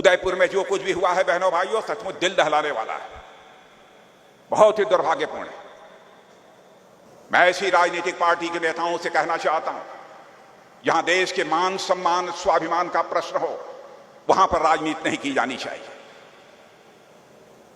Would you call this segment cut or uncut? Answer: cut